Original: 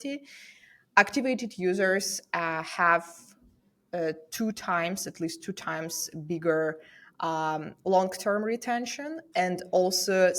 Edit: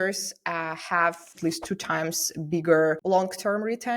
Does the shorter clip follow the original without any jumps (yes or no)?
no